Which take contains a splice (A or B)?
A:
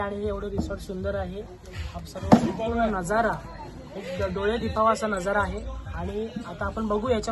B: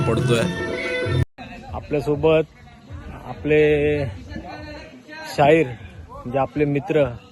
B